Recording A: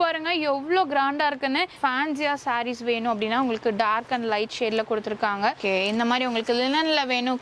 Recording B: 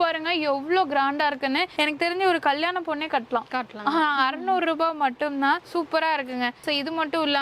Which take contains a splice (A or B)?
A